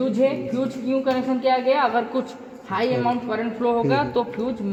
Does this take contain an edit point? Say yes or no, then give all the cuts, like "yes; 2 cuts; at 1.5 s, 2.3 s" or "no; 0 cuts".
no; 0 cuts